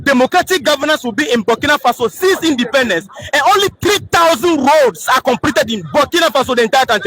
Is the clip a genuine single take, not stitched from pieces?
yes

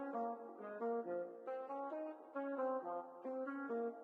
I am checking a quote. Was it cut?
no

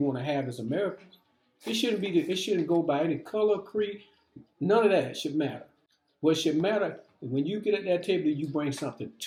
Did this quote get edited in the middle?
no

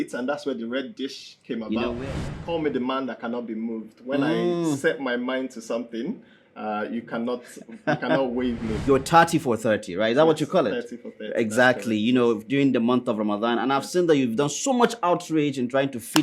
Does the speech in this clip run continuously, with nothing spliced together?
no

